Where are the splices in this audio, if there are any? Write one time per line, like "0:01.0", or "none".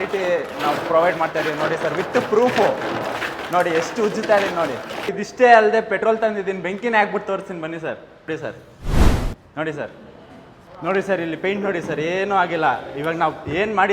0:04.9
0:10.7